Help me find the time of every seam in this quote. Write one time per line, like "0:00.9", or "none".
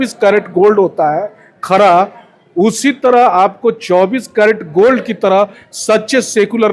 none